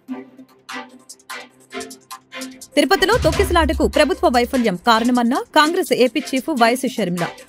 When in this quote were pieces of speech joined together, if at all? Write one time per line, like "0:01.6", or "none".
none